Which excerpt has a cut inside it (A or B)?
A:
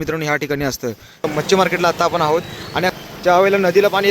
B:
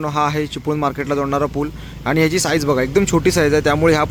A